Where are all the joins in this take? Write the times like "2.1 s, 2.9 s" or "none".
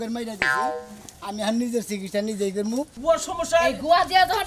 2.9 s